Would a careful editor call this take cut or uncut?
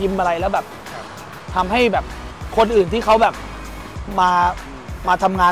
uncut